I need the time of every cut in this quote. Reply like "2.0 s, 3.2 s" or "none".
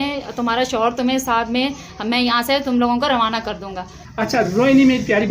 4.1 s

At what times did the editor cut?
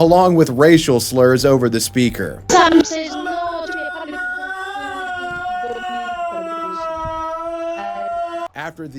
2.9 s

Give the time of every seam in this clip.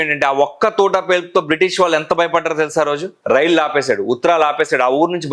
none

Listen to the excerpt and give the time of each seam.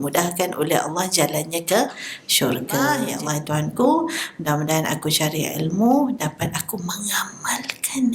3.1 s

